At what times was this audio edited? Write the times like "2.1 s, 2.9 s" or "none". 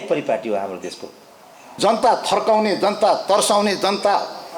1.7 s